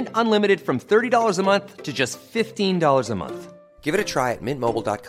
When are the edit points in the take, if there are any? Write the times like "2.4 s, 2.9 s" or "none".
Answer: none